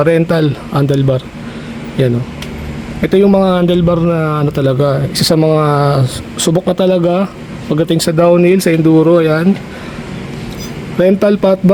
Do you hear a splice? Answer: no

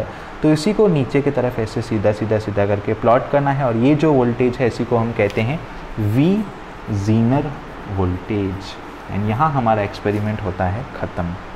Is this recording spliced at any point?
no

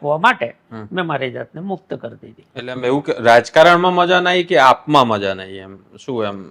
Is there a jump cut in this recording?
no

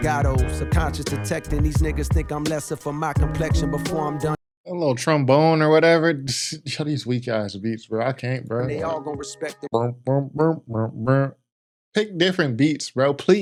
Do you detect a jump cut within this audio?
no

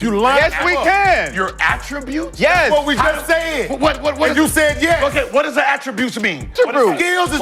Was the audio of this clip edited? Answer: yes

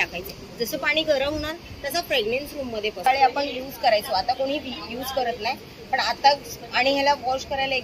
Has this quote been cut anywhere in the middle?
yes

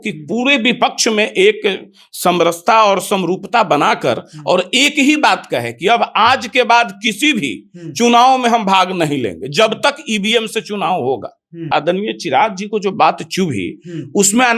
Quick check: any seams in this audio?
yes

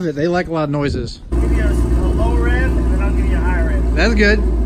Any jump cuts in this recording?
yes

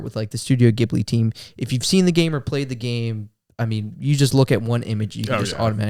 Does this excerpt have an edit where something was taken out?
no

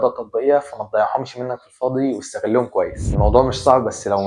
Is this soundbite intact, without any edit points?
no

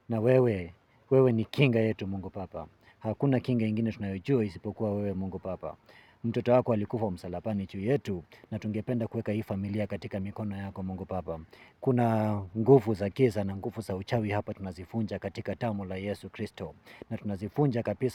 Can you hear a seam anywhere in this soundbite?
no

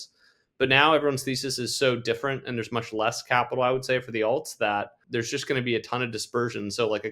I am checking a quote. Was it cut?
yes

